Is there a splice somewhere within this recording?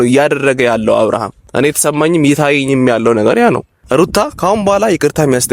yes; 2 cuts; at 1.4 s, 3.8 s

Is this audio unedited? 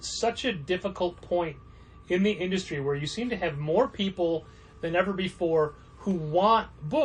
yes; 0 cuts

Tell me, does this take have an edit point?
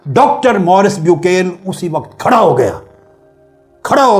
no; 0 cuts

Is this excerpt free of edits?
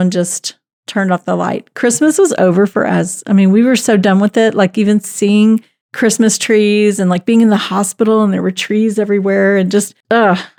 yes; 0 cuts

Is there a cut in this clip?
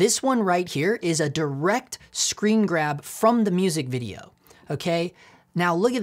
no; 0 cuts

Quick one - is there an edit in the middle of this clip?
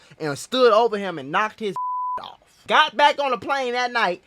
yes; 1 cut; at 2.6 s

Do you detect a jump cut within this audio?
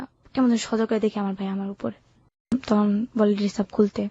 yes; 1 cut; at 2.5 s

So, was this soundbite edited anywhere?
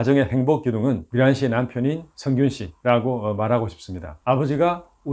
yes; 1 cut; at 4.1 s

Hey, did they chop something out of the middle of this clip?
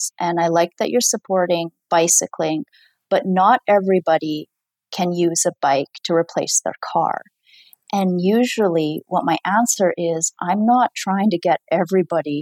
no; 0 cuts

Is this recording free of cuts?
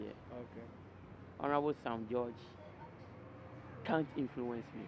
yes; 0 cuts

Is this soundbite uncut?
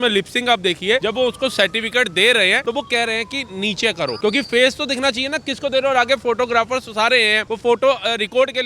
no; 4 cuts; at 1.0 s, 2.6 s, 4.2 s, 7.4 s

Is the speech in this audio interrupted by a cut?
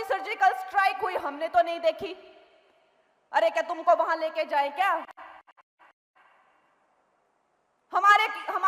no; 0 cuts

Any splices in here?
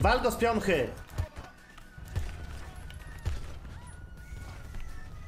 yes; 1 cut; at 3.0 s

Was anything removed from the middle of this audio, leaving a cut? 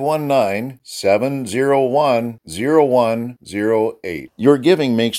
no; 0 cuts

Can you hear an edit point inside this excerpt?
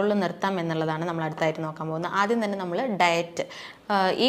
no; 0 cuts

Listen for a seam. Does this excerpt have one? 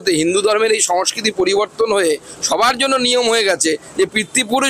no; 0 cuts

